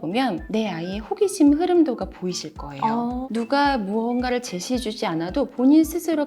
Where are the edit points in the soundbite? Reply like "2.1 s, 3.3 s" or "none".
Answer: 3.2 s